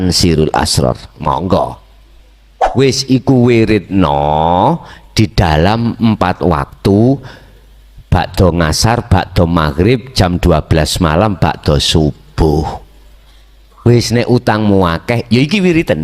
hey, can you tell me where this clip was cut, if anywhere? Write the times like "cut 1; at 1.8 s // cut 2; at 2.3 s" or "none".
cut 1; at 2.6 s